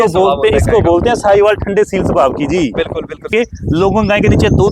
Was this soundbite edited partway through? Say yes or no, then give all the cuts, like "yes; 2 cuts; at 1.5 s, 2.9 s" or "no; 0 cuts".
yes; 1 cut; at 3.3 s